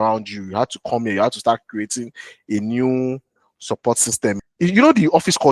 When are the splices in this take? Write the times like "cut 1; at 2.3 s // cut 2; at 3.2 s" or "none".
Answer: cut 1; at 4.4 s